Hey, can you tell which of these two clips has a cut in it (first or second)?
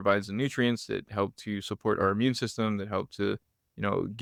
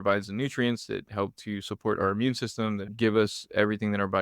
second